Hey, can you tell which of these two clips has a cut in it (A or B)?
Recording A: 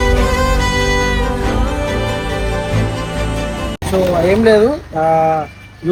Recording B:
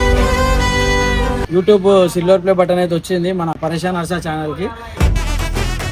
B